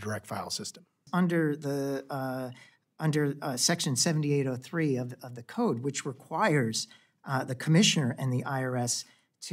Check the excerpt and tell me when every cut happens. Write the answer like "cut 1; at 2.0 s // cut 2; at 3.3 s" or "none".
cut 1; at 1.0 s